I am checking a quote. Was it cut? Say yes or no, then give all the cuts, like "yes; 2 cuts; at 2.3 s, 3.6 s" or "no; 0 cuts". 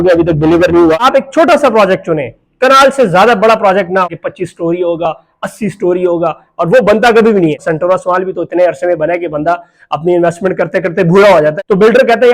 yes; 4 cuts; at 1.0 s, 4.1 s, 7.6 s, 11.5 s